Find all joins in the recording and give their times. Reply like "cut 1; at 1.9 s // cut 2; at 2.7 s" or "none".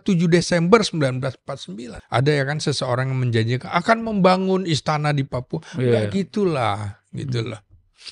cut 1; at 1.9 s